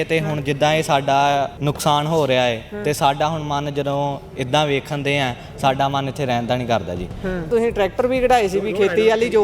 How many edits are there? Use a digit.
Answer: 2